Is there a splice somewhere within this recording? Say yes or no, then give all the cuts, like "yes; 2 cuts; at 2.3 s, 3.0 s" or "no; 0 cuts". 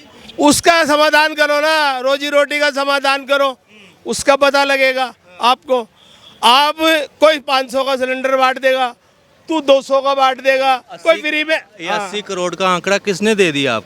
no; 0 cuts